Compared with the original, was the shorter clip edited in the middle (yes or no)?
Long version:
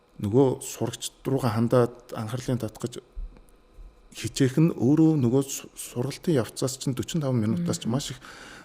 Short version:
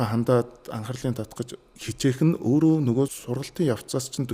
yes